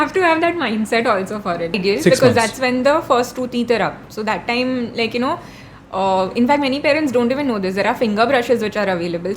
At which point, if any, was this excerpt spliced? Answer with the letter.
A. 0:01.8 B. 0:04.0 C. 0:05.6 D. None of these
A